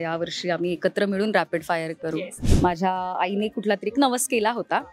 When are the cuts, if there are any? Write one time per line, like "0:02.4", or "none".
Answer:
0:02.4